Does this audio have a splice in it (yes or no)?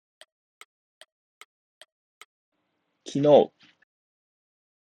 yes